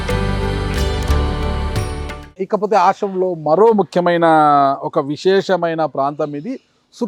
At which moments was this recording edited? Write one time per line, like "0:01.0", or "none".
none